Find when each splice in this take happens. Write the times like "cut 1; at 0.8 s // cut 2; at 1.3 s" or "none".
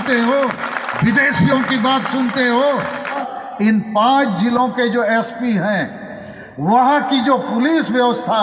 cut 1; at 3.2 s